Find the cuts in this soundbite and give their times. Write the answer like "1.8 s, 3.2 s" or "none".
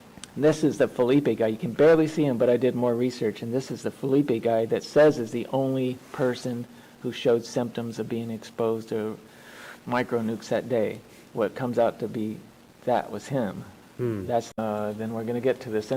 14.5 s